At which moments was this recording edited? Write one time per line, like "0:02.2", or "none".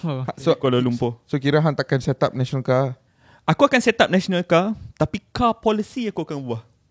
none